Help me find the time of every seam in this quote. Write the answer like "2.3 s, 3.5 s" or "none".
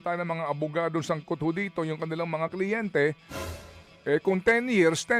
none